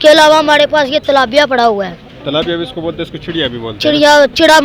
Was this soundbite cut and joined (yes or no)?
no